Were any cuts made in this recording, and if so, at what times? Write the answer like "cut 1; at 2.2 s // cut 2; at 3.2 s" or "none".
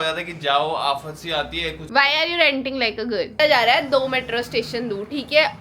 cut 1; at 1.8 s // cut 2; at 3.4 s